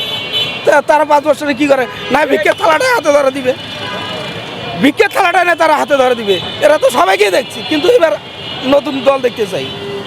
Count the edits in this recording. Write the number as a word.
zero